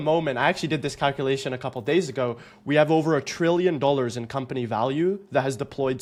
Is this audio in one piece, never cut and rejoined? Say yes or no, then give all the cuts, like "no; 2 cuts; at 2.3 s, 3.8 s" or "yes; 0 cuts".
yes; 0 cuts